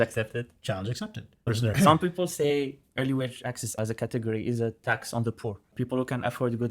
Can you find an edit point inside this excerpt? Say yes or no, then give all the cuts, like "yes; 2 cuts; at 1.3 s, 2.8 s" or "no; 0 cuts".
yes; 1 cut; at 1.5 s